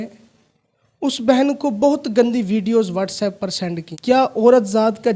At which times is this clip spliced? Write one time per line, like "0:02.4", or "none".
0:03.9